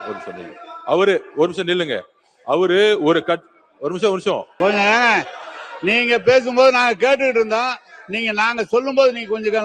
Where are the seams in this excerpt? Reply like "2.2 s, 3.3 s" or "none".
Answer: 4.5 s

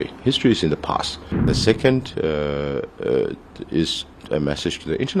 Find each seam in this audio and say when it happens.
1.4 s

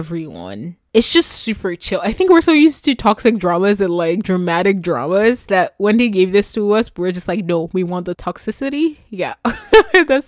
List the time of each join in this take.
none

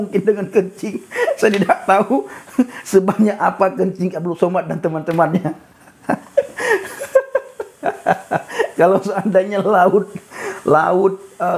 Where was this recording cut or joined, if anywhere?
none

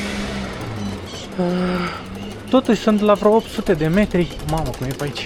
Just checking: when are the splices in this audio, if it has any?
none

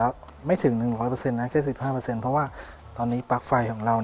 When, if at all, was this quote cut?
none

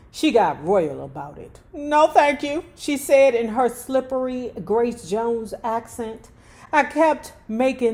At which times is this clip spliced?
none

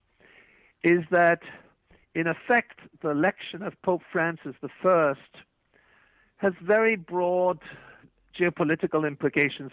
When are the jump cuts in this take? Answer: none

